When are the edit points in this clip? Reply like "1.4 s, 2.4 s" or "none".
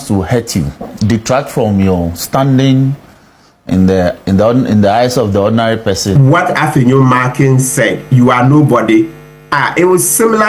6.1 s